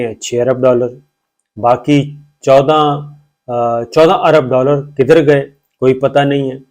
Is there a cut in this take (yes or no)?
no